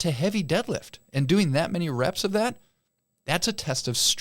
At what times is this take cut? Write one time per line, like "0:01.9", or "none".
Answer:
0:01.0